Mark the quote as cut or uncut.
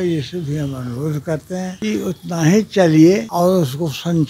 cut